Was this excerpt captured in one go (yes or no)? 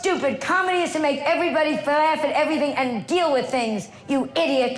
yes